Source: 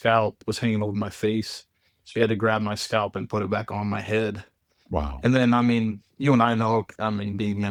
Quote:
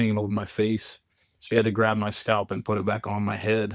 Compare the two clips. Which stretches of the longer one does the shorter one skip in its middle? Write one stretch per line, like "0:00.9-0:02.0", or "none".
none